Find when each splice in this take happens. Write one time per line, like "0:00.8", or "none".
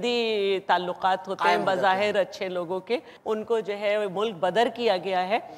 0:03.1